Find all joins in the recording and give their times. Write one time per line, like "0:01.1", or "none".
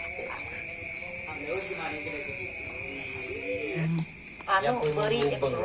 0:03.8